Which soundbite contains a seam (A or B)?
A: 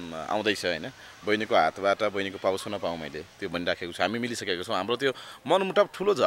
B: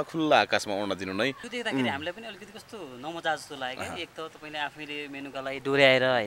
B